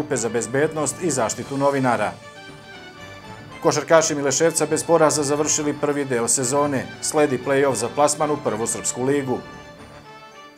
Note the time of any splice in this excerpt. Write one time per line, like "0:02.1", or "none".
none